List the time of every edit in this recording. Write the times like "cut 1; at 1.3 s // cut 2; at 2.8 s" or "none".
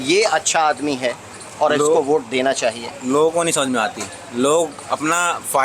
none